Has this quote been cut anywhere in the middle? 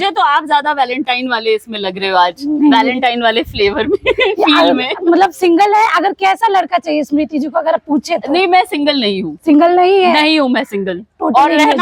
no; 0 cuts

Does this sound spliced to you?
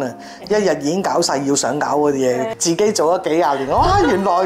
yes; 1 cut; at 2.5 s

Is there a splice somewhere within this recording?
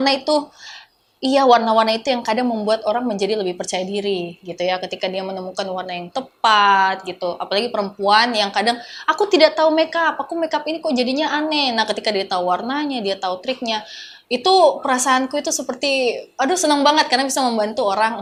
no; 0 cuts

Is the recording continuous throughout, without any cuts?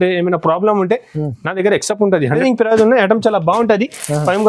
no; 1 cut; at 2.4 s

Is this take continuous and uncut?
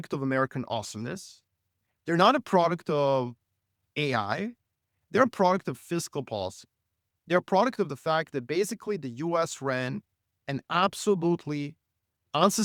yes; 0 cuts

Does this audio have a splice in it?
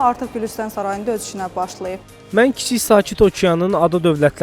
yes; 1 cut; at 2.0 s

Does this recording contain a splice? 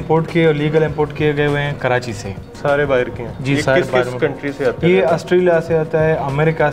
yes; 1 cut; at 2.5 s

